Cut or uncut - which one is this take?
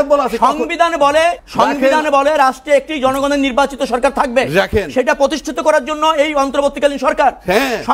cut